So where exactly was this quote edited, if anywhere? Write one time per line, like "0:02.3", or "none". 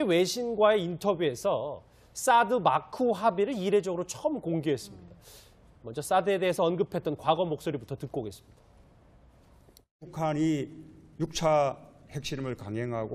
none